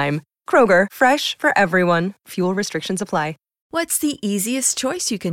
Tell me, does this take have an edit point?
yes; 1 cut; at 3.5 s

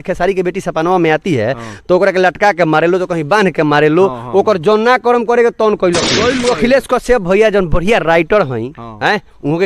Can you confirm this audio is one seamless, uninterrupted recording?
no; 1 cut; at 6.4 s

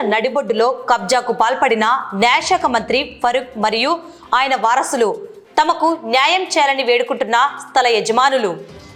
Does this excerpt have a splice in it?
no; 0 cuts

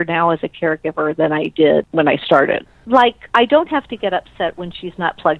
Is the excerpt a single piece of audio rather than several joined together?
no; 1 cut; at 2.7 s

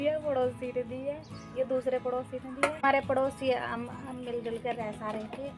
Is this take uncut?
no; 1 cut; at 2.8 s

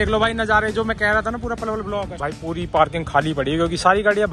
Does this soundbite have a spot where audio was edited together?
yes; 1 cut; at 2.2 s

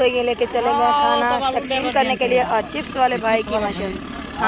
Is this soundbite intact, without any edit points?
yes; 0 cuts

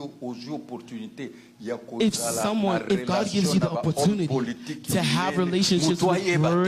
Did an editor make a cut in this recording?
no; 0 cuts

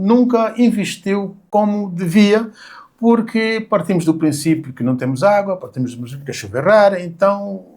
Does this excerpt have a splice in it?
yes; 1 cut; at 1.3 s

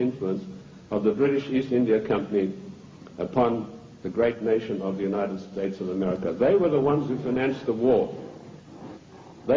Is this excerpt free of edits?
no; 1 cut; at 5.3 s

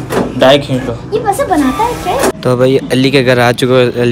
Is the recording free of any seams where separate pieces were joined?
no; 1 cut; at 2.4 s

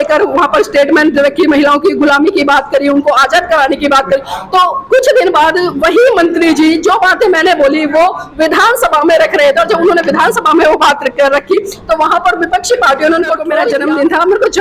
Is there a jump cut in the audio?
yes; 1 cut; at 13.7 s

